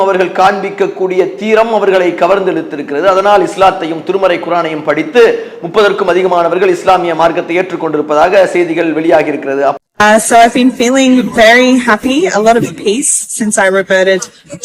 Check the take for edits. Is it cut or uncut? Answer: uncut